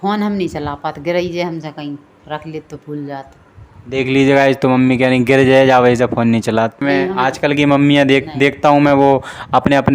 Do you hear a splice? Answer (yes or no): yes